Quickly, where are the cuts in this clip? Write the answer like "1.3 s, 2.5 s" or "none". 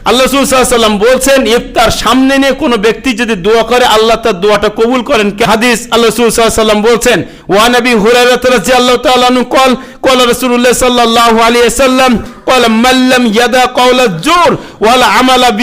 5.4 s

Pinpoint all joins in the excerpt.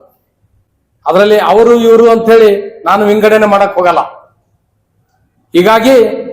none

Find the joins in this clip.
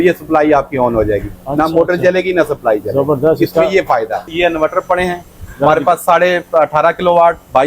4.3 s

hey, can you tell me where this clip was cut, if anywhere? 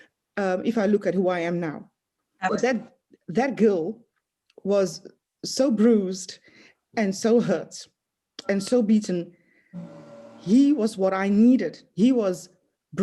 2.5 s

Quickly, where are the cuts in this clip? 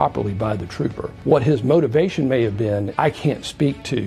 1.1 s, 2.9 s

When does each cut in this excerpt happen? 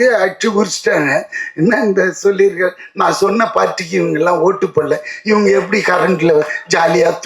none

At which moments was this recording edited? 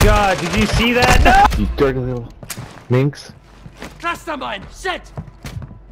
1.5 s

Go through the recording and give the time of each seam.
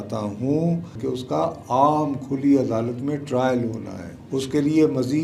0.9 s

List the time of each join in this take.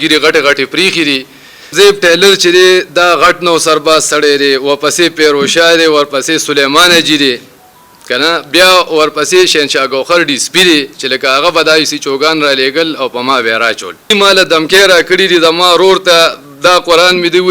1.7 s, 14.0 s

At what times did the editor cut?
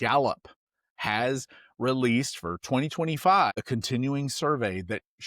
3.6 s

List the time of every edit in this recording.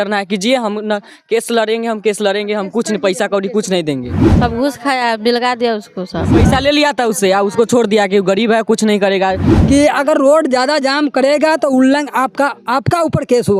4.2 s, 6.3 s, 9.5 s

